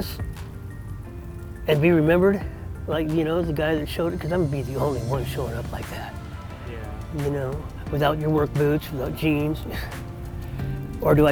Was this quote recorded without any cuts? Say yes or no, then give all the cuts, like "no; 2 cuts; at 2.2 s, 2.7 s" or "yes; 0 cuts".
yes; 0 cuts